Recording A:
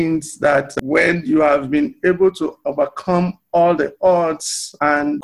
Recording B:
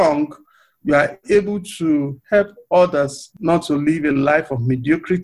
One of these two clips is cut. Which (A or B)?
B